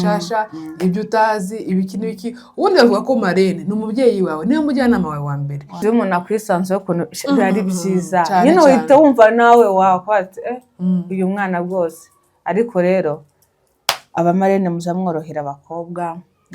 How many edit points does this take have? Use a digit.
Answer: 1